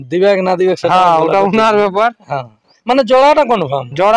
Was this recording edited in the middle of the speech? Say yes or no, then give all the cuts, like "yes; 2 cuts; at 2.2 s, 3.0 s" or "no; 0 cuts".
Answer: no; 0 cuts